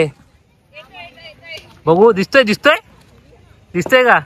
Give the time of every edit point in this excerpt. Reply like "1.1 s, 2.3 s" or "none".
none

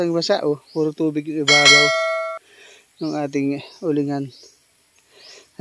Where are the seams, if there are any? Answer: none

